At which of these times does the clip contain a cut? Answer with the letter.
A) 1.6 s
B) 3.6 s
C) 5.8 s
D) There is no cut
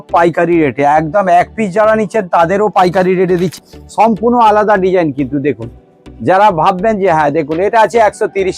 B